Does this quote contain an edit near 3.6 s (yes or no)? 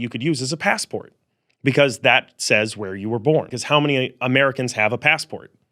yes